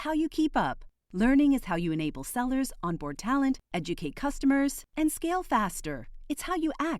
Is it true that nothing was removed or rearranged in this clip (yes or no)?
yes